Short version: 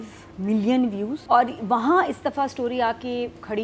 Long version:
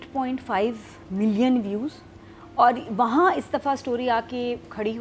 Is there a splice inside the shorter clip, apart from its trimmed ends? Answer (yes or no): yes